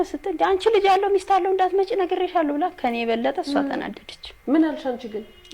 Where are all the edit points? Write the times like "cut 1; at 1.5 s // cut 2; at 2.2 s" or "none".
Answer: none